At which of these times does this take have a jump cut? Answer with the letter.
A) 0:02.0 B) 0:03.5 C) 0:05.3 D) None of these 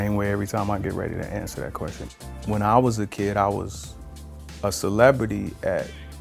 A